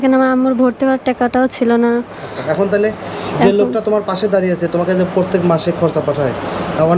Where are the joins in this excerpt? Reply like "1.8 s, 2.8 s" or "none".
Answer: none